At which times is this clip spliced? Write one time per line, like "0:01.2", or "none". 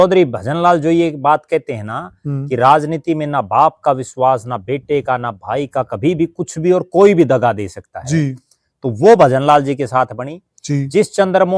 none